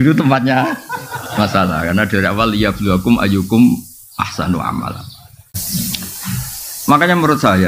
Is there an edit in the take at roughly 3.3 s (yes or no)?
no